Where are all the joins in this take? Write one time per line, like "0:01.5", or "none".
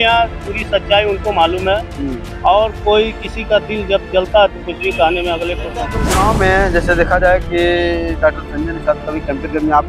0:06.0